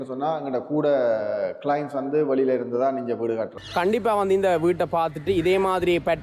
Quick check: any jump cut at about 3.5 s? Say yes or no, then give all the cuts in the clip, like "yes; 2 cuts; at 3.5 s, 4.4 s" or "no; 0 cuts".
yes; 1 cut; at 3.5 s